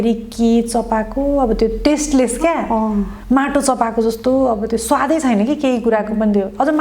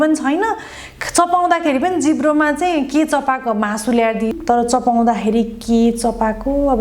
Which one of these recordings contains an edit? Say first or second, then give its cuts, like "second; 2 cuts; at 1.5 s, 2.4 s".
second; 1 cut; at 4.3 s